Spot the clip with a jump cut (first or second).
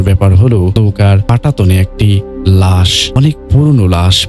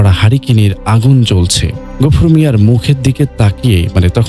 first